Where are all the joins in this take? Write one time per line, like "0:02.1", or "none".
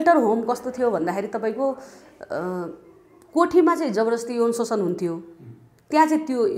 none